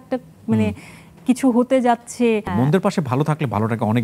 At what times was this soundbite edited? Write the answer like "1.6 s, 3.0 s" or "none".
2.5 s

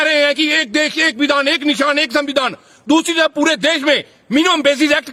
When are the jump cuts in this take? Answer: none

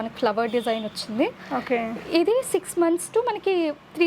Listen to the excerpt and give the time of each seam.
none

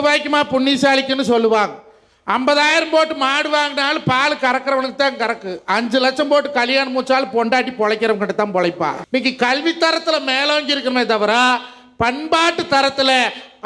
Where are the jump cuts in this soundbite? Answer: 9.0 s

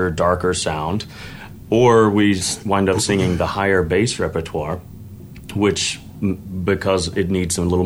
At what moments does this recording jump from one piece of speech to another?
none

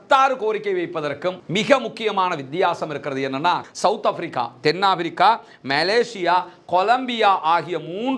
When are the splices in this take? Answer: 3.7 s

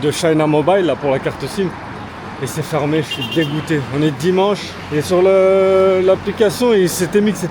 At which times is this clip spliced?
none

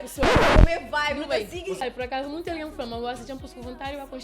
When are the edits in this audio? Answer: 1.8 s

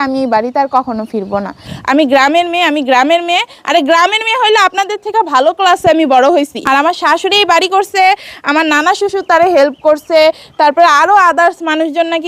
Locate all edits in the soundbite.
1.7 s, 6.7 s

